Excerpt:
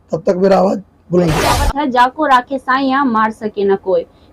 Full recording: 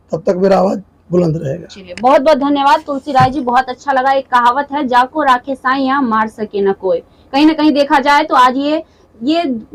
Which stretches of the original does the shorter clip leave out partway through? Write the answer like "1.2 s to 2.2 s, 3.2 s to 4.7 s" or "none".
1.6 s to 4.6 s